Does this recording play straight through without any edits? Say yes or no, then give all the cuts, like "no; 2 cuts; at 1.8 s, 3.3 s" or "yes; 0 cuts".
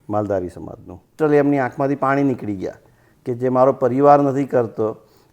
no; 1 cut; at 1.1 s